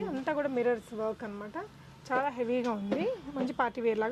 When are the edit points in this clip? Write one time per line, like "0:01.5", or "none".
none